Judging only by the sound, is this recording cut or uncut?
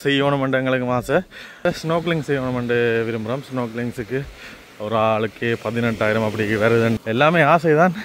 cut